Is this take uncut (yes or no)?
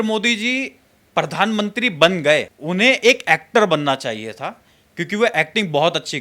no